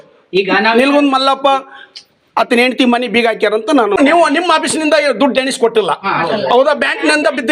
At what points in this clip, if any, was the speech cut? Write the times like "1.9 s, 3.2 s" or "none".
4.0 s